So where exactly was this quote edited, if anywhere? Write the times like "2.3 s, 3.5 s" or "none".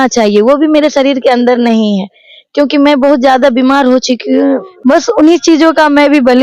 4.7 s